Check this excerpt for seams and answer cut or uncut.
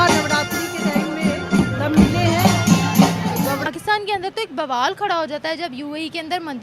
cut